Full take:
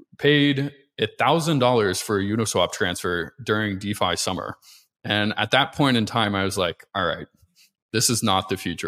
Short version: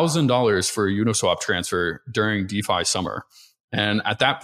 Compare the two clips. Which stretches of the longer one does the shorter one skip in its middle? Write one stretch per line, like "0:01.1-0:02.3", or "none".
none